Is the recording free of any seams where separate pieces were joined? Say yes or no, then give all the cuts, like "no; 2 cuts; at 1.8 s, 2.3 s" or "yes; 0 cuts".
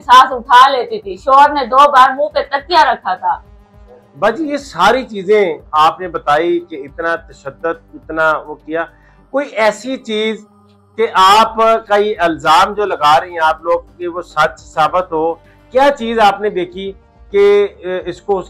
yes; 0 cuts